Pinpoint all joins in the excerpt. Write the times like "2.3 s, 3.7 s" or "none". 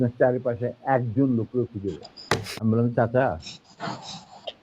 2.5 s